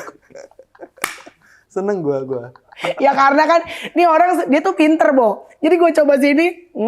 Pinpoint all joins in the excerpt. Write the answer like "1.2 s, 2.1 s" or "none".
2.7 s